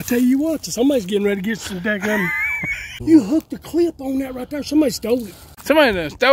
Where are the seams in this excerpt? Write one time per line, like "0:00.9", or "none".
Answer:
0:03.0
0:05.5